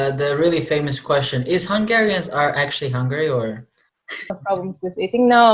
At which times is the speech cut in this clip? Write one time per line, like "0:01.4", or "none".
0:04.4